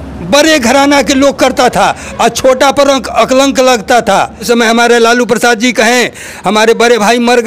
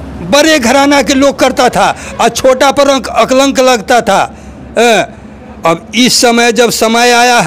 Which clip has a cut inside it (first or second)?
first